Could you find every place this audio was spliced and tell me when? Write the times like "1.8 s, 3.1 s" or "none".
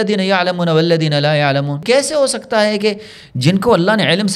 1.8 s